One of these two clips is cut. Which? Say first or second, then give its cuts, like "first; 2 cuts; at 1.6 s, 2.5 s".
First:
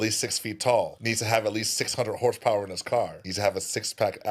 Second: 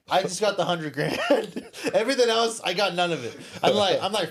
first; 2 cuts; at 1.0 s, 3.2 s